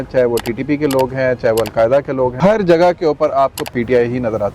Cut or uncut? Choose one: cut